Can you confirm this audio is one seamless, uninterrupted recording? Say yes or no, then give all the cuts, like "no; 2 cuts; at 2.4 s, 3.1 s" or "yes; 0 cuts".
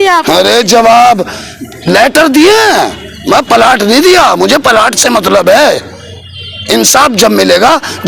yes; 0 cuts